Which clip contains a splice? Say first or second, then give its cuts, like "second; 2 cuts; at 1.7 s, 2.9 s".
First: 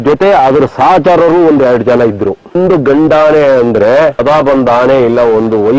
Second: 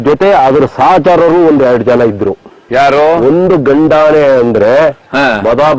first; 2 cuts; at 2.6 s, 4.2 s